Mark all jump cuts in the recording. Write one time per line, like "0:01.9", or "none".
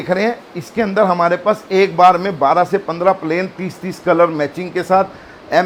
none